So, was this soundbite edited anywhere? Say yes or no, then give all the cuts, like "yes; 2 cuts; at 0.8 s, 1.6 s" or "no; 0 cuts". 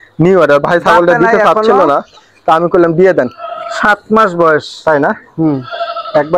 no; 0 cuts